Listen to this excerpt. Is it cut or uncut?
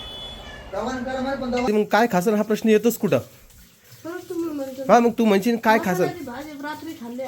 cut